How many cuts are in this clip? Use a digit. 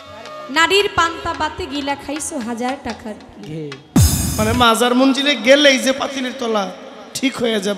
1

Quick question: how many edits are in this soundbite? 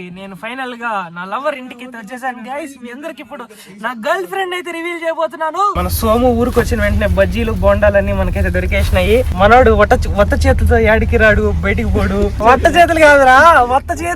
3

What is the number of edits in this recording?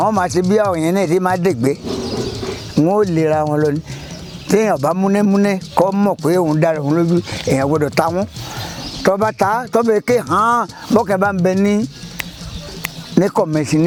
0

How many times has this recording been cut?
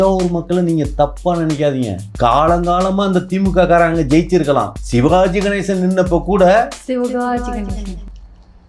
2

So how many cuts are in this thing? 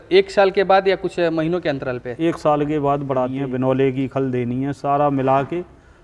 1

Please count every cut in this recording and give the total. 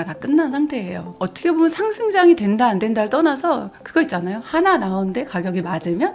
1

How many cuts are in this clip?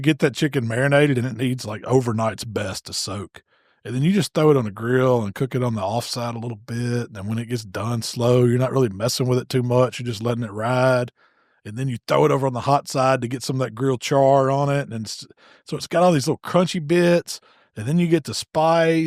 0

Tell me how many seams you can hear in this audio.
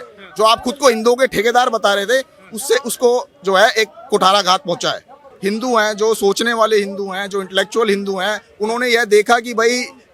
1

